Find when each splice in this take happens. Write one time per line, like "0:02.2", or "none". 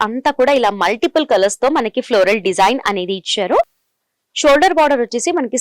none

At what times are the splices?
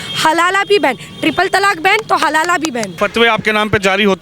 0:02.9

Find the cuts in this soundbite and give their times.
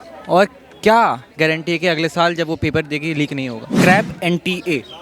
0:03.7

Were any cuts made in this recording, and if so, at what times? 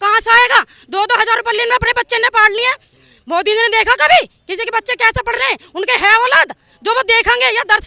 none

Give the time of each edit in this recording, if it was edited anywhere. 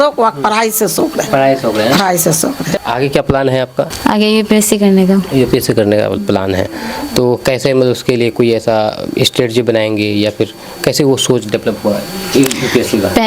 0:02.6
0:03.9

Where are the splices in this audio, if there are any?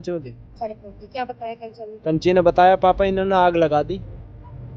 none

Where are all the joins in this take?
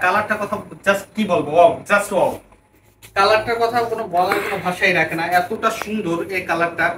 none

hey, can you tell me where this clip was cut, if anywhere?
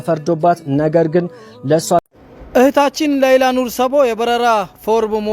0:02.1

